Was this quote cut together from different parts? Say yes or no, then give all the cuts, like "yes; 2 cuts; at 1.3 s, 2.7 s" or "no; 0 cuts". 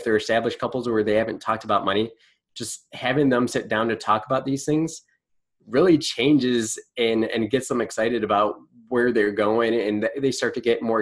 no; 0 cuts